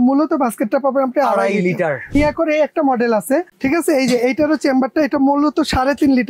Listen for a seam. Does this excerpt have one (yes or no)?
yes